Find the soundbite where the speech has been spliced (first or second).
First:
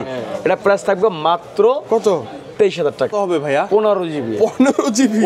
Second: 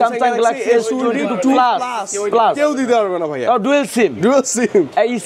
first